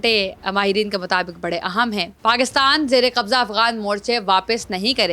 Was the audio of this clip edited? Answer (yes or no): yes